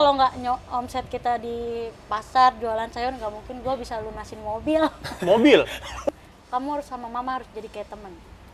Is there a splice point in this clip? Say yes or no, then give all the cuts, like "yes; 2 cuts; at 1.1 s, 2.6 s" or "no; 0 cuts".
yes; 1 cut; at 5.9 s